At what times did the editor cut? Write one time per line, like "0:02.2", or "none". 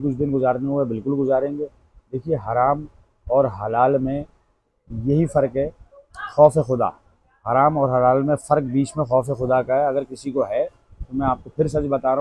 none

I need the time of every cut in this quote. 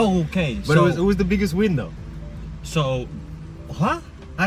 none

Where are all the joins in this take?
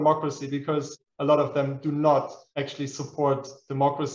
0:01.0
0:02.4

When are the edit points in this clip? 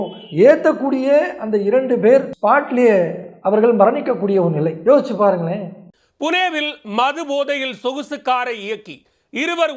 0:02.3

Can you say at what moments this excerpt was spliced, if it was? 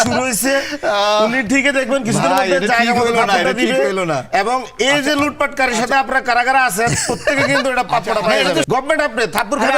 0:08.6

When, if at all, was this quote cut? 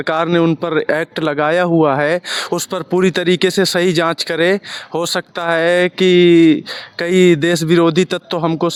none

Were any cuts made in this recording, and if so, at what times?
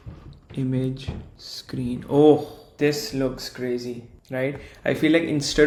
none

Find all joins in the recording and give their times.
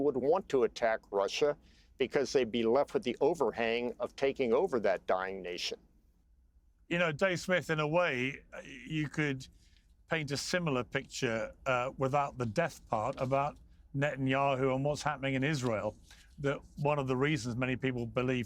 none

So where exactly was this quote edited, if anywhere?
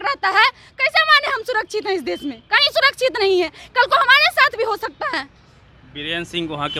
none

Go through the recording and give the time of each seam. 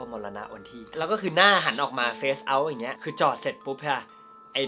none

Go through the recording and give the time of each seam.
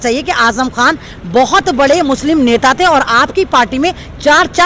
none

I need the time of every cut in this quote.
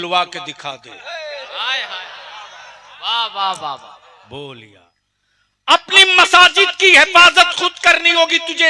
0:04.6

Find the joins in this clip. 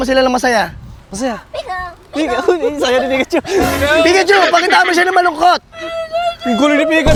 none

